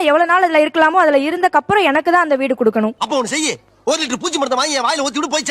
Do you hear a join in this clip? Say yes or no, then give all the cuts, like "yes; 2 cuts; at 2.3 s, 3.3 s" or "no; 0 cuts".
no; 0 cuts